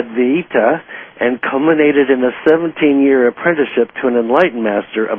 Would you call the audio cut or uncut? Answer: uncut